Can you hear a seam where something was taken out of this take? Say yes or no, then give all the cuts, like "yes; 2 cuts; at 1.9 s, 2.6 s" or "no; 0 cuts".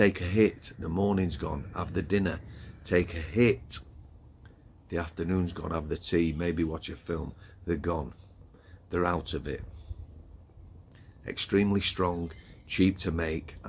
no; 0 cuts